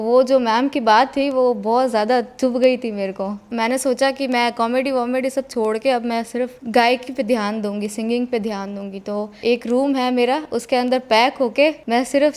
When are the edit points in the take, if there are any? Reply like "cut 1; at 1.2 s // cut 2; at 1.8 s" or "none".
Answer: none